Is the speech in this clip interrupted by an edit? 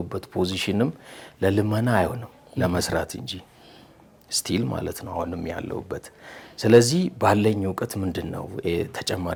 no; 0 cuts

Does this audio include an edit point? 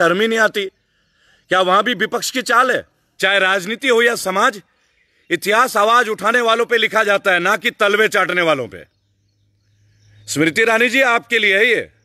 yes; 1 cut; at 3.0 s

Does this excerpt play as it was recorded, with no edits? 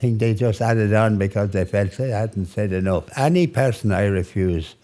no; 1 cut; at 3.1 s

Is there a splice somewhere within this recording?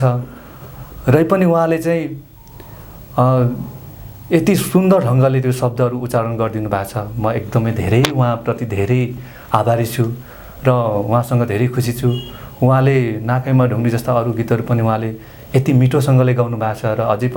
no; 0 cuts

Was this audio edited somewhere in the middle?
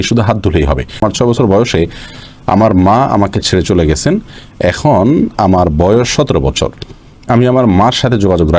yes; 1 cut; at 0.9 s

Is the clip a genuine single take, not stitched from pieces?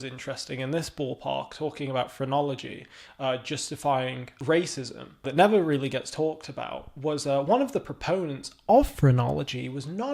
yes; 0 cuts

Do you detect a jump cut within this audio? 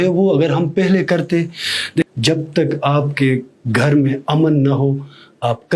yes; 1 cut; at 2.0 s

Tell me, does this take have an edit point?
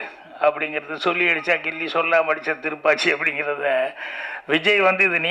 no; 0 cuts

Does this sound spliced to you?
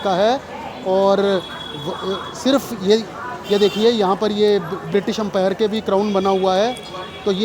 no; 0 cuts

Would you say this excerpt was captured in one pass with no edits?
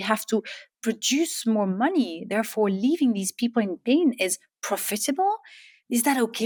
yes; 0 cuts

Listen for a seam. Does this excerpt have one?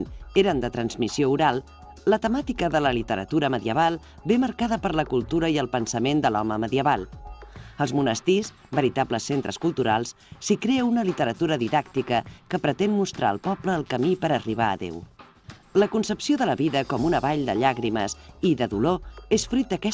yes; 1 cut; at 2.9 s

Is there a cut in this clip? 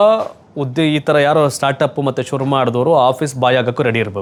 no; 0 cuts

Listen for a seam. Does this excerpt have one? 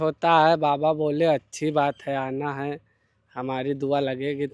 no; 0 cuts

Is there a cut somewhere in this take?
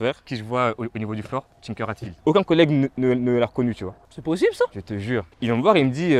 yes; 2 cuts; at 2.2 s, 5.3 s

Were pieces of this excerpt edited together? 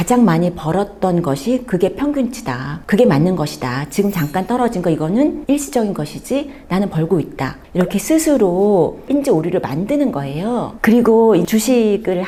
no; 0 cuts

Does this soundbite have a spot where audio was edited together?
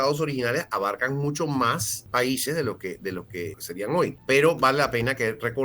yes; 2 cuts; at 1.9 s, 3.7 s

